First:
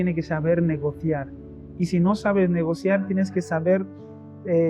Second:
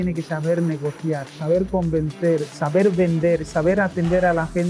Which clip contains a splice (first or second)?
second